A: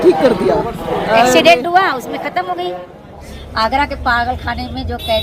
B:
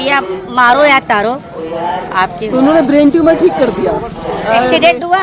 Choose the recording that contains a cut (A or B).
A